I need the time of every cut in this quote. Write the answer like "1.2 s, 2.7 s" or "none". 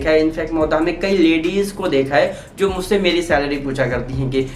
none